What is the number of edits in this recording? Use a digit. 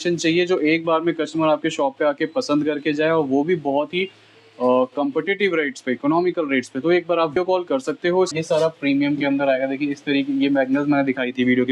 2